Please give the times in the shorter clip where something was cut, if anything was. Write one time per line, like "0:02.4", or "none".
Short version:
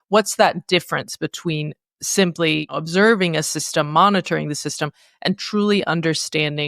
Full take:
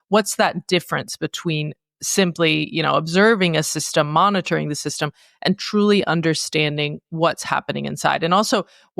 0:02.7